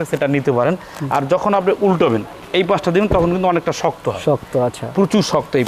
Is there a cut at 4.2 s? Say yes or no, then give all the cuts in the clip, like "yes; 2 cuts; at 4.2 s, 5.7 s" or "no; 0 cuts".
no; 0 cuts